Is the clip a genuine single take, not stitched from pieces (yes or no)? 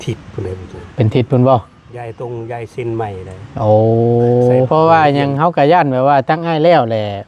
no